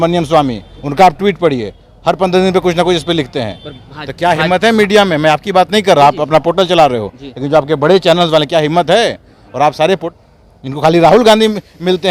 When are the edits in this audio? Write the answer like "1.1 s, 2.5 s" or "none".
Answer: 10.0 s